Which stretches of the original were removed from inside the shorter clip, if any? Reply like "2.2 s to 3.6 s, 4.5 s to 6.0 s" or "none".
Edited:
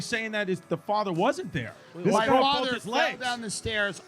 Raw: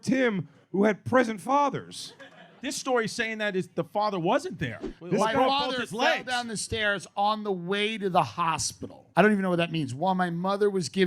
none